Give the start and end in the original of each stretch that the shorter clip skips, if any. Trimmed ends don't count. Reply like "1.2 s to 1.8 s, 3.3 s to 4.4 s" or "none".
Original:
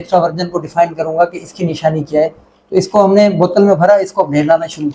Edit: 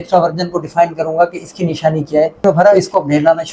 2.4 s to 3.7 s